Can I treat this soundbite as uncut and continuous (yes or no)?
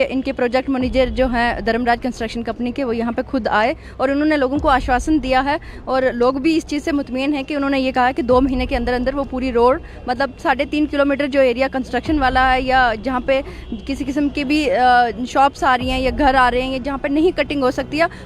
yes